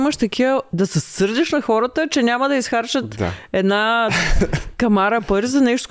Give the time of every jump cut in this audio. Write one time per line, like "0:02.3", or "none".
none